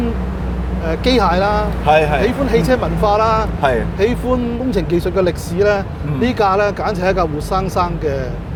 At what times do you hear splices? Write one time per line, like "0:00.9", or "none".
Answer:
none

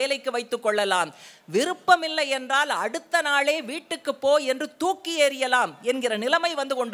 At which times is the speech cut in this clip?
none

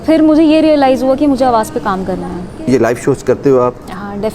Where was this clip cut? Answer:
0:02.7

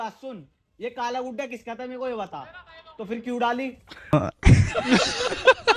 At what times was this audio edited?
none

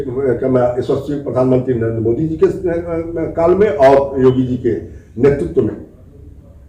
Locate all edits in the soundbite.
none

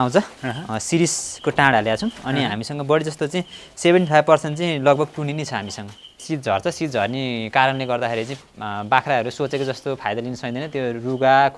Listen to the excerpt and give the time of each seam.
0:06.2

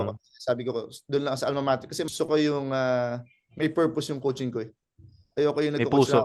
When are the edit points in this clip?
0:02.1

